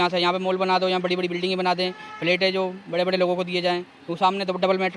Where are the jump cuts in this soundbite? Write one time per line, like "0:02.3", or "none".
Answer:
none